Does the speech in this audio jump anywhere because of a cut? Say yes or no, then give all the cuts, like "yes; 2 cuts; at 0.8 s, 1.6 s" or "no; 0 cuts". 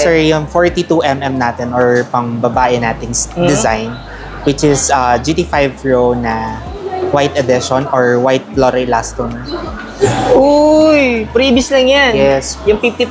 yes; 1 cut; at 10.1 s